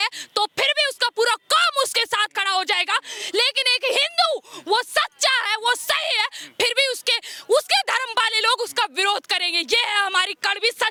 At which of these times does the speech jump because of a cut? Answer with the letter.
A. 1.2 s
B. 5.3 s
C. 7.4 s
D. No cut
D